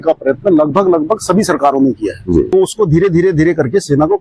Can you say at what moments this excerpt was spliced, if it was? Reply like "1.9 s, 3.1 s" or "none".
2.5 s